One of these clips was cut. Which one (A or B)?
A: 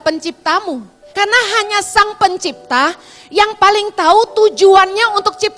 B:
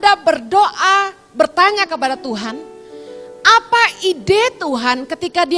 A